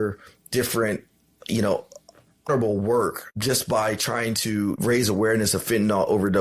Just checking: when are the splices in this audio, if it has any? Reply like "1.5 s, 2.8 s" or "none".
2.5 s, 3.3 s, 4.8 s